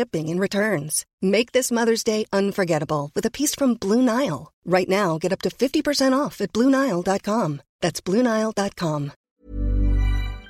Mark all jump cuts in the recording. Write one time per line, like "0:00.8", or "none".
0:09.2